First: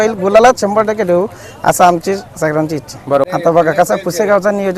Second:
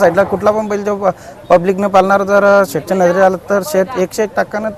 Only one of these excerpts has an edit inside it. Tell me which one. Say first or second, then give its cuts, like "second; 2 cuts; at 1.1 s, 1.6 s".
first; 1 cut; at 3.3 s